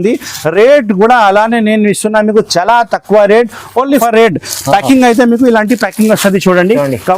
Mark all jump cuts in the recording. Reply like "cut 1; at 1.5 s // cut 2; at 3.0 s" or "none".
cut 1; at 4.0 s